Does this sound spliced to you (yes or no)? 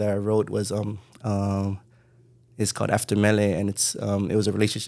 no